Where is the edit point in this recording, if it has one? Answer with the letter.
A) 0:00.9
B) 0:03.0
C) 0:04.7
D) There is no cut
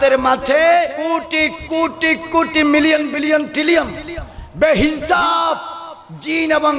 A